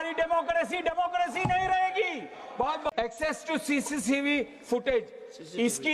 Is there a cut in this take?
yes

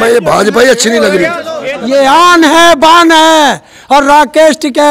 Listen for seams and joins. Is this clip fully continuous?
no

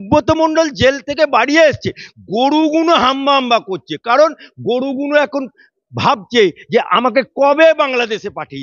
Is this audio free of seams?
yes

